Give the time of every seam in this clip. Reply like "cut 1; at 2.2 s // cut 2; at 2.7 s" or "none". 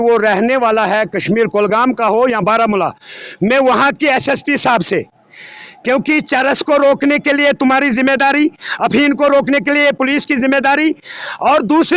none